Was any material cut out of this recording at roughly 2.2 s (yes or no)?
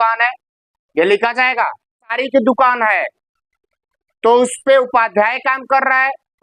yes